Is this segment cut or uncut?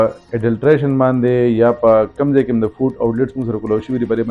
uncut